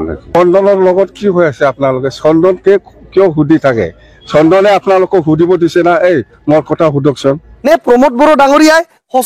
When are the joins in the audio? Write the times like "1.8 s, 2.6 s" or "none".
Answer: 7.5 s